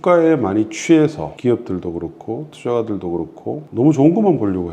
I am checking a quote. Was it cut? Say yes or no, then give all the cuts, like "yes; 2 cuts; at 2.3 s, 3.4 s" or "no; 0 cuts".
yes; 2 cuts; at 1.3 s, 3.6 s